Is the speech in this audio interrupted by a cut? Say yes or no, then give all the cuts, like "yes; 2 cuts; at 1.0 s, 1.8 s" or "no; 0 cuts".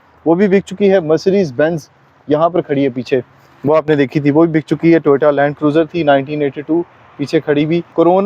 no; 0 cuts